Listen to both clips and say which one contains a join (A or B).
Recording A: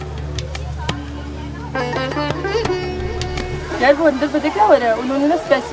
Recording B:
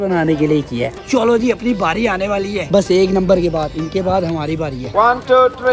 B